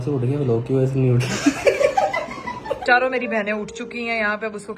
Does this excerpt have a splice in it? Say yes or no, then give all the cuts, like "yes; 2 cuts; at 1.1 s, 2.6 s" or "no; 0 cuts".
yes; 1 cut; at 2.8 s